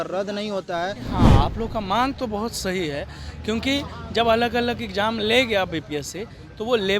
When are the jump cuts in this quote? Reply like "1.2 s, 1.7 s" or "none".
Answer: 1.2 s

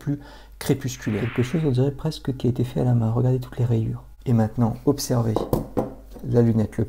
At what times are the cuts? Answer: 1.3 s, 4.1 s

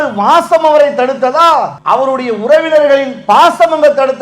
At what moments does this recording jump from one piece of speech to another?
1.8 s

